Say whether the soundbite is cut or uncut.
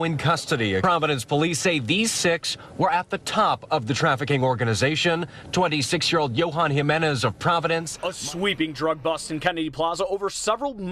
cut